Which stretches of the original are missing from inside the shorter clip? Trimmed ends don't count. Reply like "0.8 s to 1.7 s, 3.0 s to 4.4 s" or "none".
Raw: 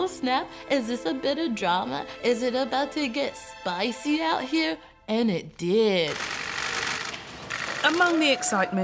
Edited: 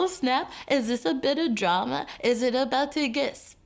none